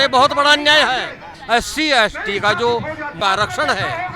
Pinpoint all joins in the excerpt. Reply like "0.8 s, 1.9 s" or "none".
1.3 s, 3.2 s

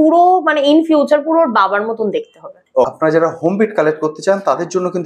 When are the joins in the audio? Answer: 2.9 s

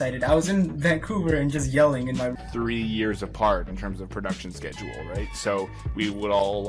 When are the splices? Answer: 2.3 s

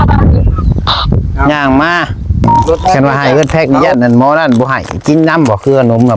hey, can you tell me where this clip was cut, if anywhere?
2.4 s

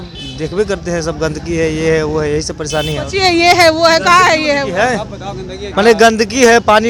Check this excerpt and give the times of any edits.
none

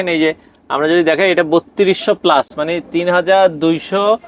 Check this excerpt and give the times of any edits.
none

